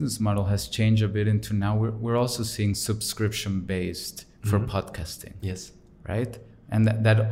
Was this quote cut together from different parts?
no; 0 cuts

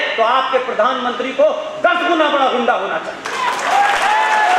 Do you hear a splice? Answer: no; 0 cuts

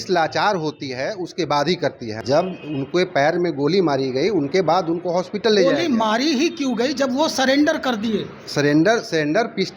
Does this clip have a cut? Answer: yes; 1 cut; at 2.2 s

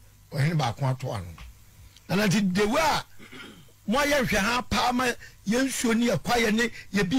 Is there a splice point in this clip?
no; 0 cuts

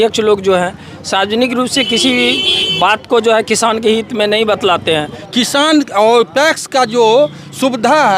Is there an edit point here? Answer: yes; 1 cut; at 5.2 s

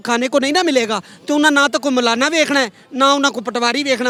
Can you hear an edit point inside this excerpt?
no; 0 cuts

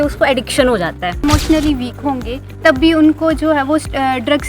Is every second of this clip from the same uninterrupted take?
no; 1 cut; at 1.2 s

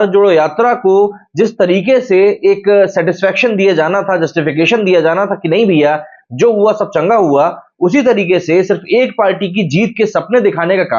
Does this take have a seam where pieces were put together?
no; 0 cuts

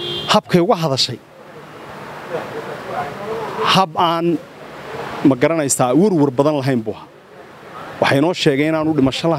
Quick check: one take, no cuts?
yes; 0 cuts

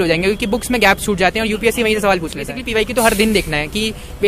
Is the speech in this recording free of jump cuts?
no; 1 cut; at 2.6 s

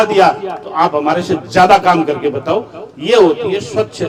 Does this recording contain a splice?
no; 0 cuts

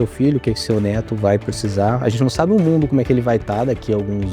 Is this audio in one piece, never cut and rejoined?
yes; 0 cuts

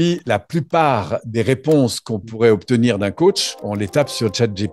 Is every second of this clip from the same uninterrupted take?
yes; 0 cuts

